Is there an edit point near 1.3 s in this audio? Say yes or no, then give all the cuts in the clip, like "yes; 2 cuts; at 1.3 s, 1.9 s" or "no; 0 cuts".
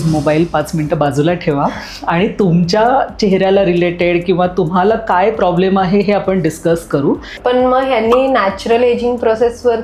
no; 1 cut; at 7.4 s